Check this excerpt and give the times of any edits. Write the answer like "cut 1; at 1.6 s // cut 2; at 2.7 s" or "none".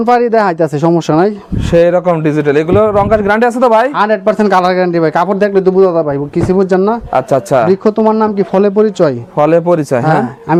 none